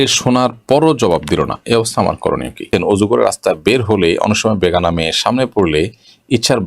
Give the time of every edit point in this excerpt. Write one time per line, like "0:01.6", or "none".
0:02.7